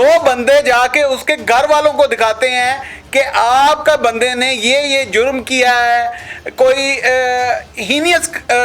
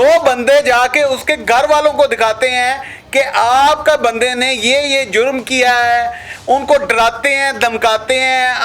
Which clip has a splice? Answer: second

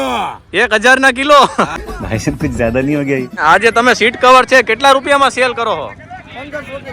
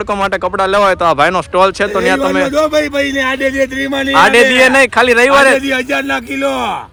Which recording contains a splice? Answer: first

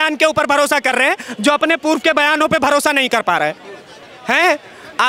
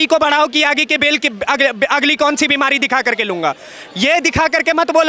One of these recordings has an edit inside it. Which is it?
first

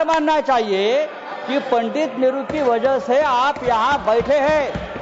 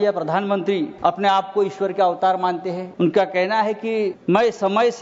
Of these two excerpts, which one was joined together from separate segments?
second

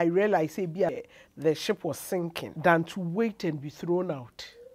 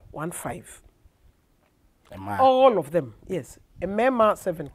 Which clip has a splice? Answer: first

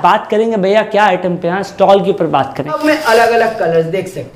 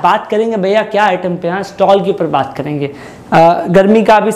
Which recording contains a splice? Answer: first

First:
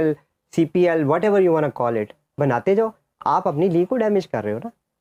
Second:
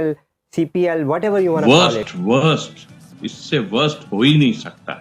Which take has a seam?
second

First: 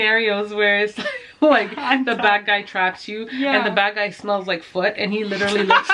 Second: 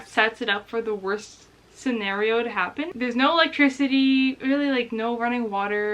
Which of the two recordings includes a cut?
second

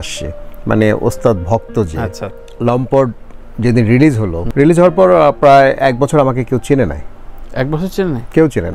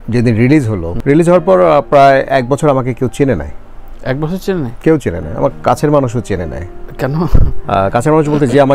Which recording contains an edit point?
first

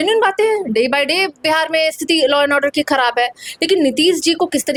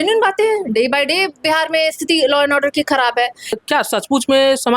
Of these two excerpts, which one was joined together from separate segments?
second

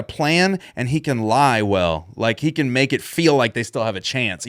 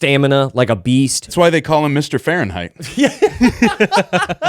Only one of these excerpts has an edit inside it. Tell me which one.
second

